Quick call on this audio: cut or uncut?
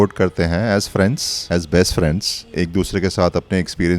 cut